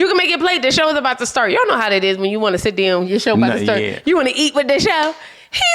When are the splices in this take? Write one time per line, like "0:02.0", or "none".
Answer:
none